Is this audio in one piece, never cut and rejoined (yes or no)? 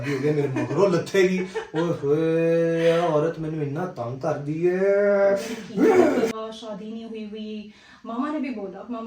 no